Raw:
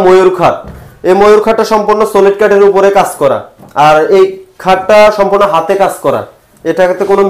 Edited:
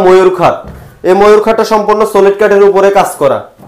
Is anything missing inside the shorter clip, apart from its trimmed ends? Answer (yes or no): no